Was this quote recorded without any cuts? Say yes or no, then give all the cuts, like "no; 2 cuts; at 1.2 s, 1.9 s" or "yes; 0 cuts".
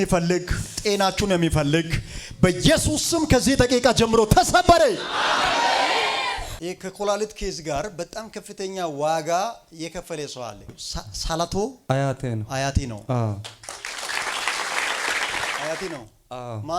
no; 3 cuts; at 6.5 s, 10.7 s, 15.6 s